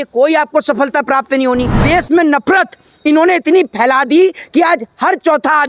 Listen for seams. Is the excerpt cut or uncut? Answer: cut